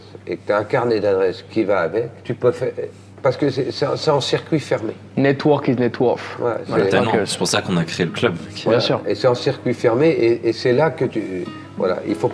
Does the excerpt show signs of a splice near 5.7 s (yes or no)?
no